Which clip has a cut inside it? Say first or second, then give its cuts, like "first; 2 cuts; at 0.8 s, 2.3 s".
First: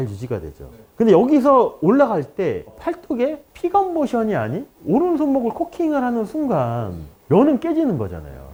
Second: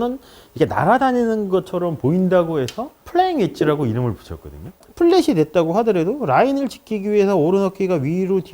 second; 1 cut; at 4.8 s